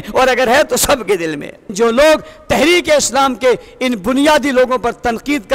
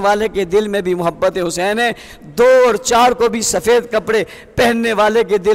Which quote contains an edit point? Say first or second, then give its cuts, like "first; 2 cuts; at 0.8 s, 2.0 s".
first; 1 cut; at 1.7 s